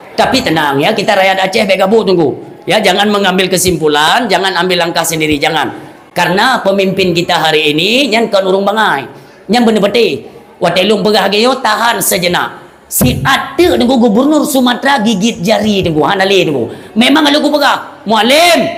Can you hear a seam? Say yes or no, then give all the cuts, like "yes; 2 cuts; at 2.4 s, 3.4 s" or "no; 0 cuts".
no; 0 cuts